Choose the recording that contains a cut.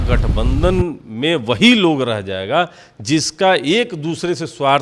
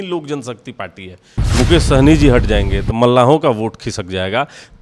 second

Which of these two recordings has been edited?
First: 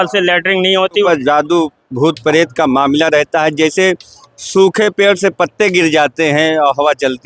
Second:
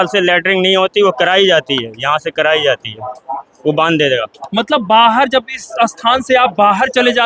first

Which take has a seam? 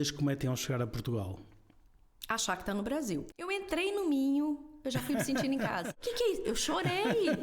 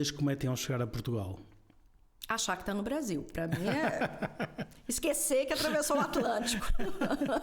first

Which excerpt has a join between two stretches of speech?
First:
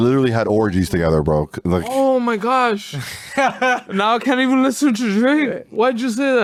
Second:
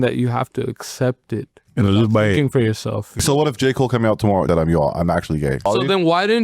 second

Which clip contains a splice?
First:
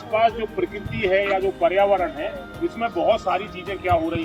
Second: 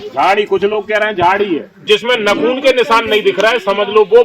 second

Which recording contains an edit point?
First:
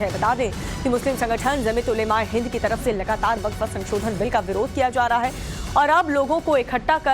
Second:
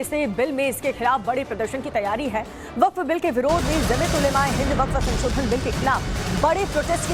first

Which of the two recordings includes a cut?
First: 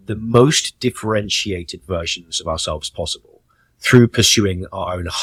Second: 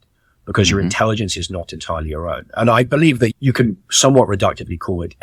second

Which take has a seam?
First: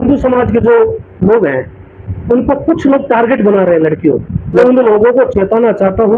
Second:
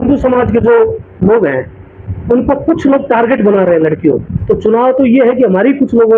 second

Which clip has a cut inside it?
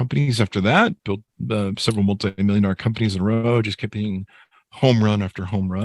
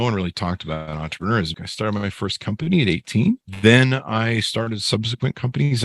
second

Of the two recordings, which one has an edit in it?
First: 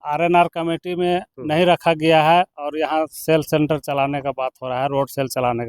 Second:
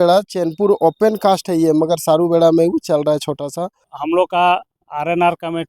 second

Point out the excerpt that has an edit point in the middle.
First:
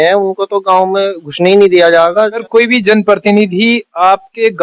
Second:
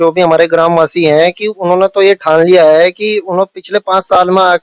first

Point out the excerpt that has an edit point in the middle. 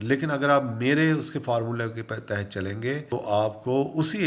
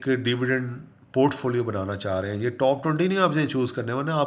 first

